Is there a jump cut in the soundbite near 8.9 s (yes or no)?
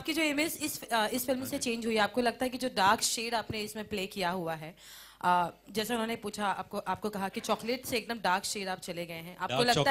no